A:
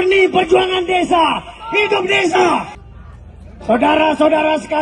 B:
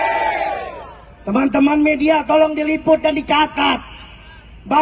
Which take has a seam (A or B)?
A